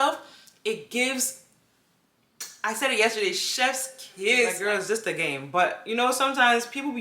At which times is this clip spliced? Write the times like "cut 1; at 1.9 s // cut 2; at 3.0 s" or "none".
cut 1; at 4.6 s